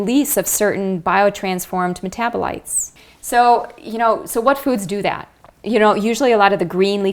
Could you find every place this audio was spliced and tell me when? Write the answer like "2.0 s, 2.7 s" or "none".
none